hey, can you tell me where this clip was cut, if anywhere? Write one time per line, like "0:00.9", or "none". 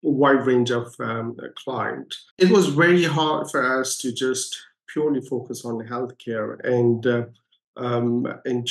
0:02.2